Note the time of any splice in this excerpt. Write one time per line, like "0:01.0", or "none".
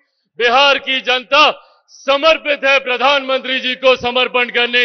none